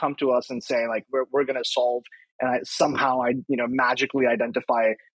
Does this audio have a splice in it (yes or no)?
no